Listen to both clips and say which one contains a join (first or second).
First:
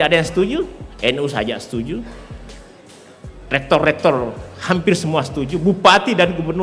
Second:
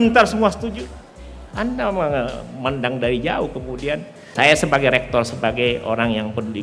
second